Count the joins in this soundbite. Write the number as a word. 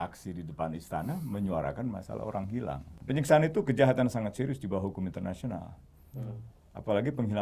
one